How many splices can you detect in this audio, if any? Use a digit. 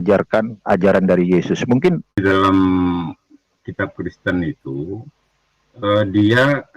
1